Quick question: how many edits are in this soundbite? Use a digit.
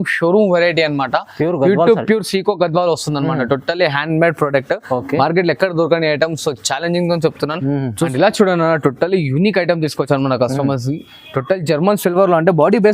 1